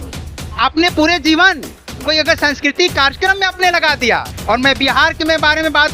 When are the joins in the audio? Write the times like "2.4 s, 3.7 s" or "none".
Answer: 4.3 s